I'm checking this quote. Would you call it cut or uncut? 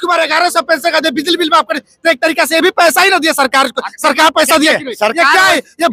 uncut